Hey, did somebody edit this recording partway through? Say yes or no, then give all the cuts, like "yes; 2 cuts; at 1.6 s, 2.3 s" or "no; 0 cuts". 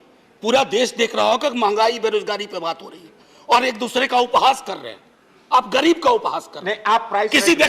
no; 0 cuts